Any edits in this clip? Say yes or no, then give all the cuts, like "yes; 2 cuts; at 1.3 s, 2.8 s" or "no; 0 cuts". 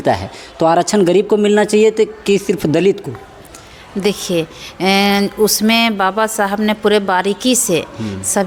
no; 0 cuts